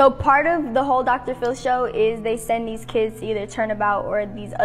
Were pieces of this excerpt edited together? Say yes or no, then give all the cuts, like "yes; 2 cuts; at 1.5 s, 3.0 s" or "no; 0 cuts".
yes; 1 cut; at 1.0 s